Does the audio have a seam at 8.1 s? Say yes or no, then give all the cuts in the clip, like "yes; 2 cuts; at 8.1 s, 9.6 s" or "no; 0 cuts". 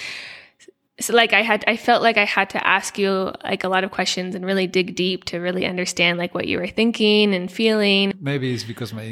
yes; 1 cut; at 8.1 s